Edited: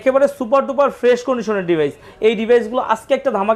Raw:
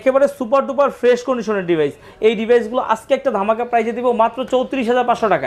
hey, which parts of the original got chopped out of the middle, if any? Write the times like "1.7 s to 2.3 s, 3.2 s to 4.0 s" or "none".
none